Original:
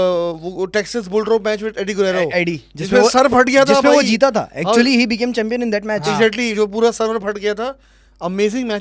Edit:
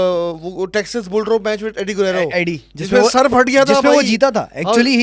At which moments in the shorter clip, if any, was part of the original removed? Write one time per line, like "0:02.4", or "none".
none